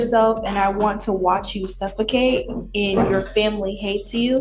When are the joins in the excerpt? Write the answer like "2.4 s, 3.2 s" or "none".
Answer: none